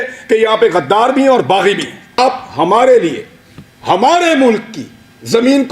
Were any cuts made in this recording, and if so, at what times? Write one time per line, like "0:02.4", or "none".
0:02.2